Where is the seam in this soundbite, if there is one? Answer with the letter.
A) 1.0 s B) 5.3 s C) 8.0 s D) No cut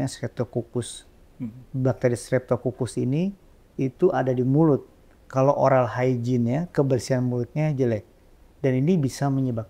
D